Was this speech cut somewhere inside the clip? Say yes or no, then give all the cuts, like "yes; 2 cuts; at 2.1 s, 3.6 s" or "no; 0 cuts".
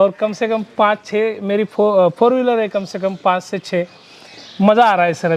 no; 0 cuts